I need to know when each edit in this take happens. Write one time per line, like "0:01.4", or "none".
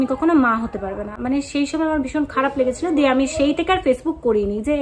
none